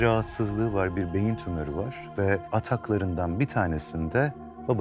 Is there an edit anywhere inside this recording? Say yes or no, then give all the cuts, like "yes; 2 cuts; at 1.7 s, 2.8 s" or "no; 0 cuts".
yes; 1 cut; at 2.5 s